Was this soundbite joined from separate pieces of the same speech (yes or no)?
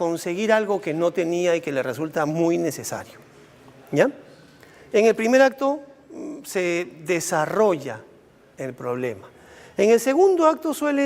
no